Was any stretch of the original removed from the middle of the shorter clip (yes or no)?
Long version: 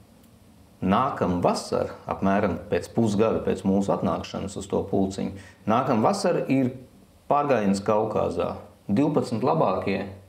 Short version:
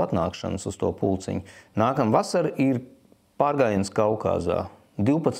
no